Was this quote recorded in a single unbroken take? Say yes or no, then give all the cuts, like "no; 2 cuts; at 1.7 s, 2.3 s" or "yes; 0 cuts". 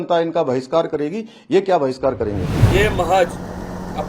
no; 1 cut; at 2.5 s